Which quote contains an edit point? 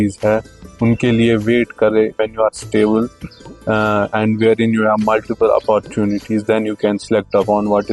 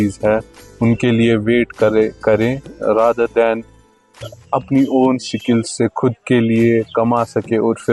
first; 1 cut; at 2.1 s

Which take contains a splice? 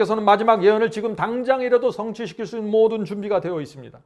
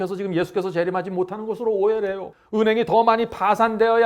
second; 1 cut; at 2.3 s

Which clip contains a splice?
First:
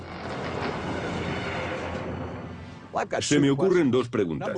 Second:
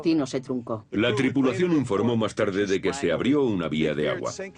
second; 1 cut; at 2.1 s

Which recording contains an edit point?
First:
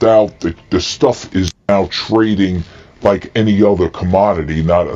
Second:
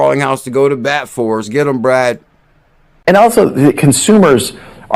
first; 1 cut; at 2.2 s

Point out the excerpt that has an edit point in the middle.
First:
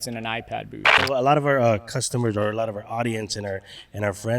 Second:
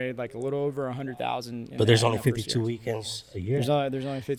first; 1 cut; at 1.0 s

